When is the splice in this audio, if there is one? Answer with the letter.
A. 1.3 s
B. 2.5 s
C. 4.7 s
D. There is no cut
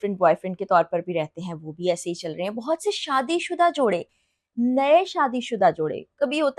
D